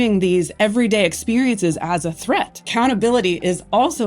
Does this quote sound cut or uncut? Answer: cut